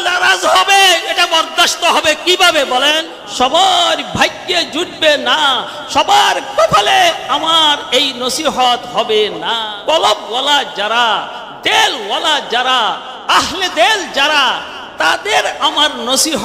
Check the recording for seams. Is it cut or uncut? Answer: cut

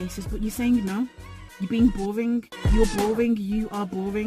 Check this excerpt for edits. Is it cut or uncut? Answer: uncut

